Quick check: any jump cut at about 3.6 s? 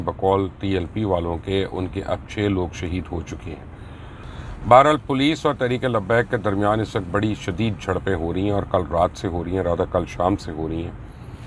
no; 0 cuts

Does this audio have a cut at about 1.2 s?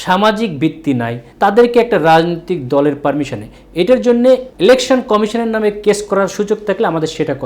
yes; 2 cuts; at 1.2 s, 4.5 s

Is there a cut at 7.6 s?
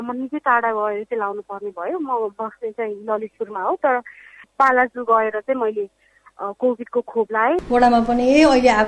yes; 2 cuts; at 4.4 s, 7.6 s

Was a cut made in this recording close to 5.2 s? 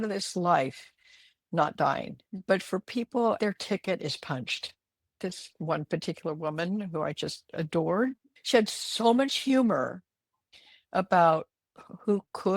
yes; 3 cuts; at 2.2 s, 3.4 s, 5.2 s

